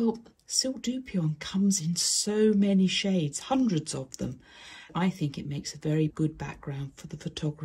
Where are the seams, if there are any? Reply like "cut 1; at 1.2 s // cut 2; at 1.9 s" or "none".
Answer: cut 1; at 4.9 s // cut 2; at 6.1 s